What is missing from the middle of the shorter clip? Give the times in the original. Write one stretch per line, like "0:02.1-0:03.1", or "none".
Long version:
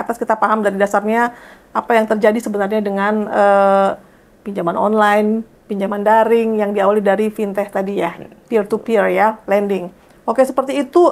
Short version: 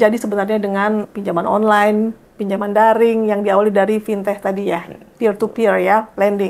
0:03.3-0:04.3